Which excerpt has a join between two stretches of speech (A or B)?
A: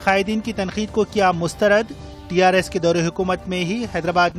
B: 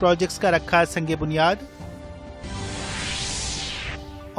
B